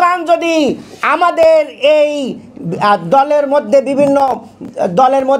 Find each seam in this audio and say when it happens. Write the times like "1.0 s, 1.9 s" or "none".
none